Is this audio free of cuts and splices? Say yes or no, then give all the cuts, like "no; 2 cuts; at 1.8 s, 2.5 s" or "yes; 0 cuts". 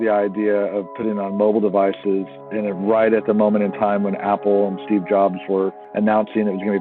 yes; 0 cuts